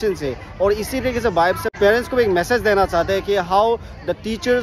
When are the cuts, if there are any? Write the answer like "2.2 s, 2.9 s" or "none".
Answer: 1.8 s